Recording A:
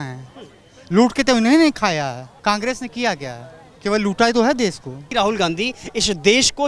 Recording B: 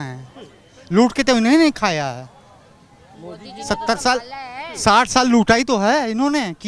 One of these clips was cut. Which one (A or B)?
A